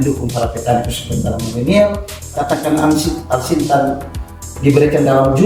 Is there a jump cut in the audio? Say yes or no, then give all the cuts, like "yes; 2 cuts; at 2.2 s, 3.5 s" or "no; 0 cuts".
yes; 1 cut; at 2.2 s